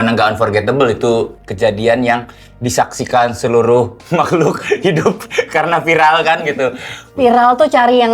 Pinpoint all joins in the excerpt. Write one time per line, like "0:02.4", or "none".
0:07.1